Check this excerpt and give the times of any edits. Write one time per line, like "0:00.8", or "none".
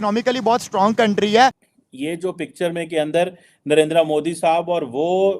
0:01.6